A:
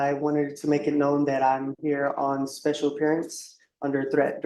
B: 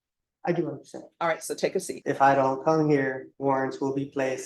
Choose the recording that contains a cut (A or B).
B